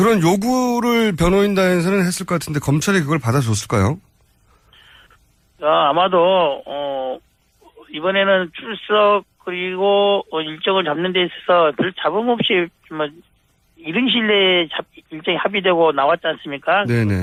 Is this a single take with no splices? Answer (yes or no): yes